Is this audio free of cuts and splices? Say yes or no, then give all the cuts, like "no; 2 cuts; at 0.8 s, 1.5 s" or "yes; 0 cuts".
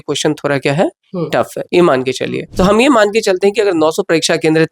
no; 1 cut; at 2.4 s